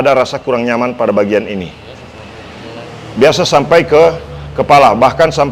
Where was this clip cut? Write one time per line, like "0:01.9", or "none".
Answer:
none